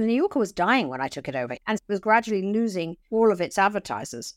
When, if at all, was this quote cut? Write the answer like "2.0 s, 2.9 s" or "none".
1.5 s, 2.9 s